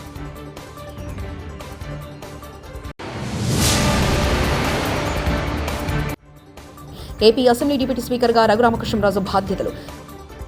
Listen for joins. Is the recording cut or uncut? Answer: uncut